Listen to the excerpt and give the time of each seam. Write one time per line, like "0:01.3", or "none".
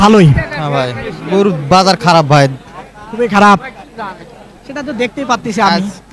none